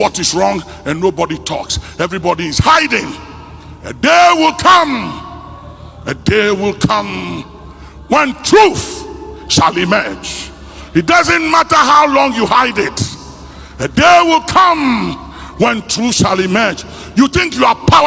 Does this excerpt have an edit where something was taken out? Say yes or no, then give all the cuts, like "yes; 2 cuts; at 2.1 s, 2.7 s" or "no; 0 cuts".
no; 0 cuts